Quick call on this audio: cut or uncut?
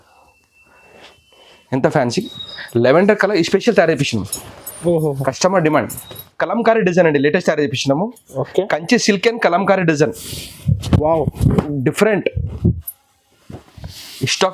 cut